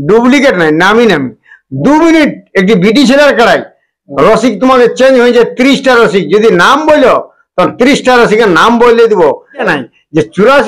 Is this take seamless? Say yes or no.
no